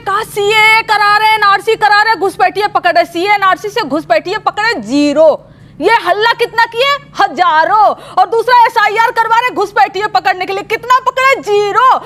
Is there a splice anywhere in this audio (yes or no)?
no